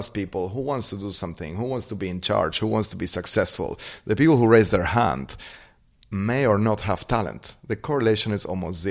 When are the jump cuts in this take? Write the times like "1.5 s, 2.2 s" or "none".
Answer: none